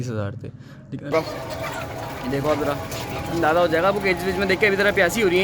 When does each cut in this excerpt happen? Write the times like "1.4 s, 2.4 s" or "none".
1.1 s